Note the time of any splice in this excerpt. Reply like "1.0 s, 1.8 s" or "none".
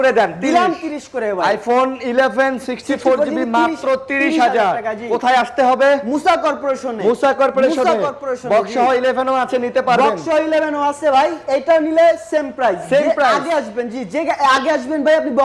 none